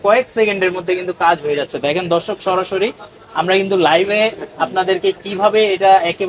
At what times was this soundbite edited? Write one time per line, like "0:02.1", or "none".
none